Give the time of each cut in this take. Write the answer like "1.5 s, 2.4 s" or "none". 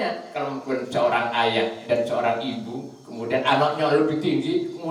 none